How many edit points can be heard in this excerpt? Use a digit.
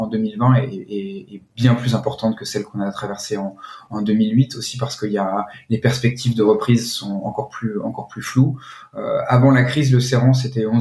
0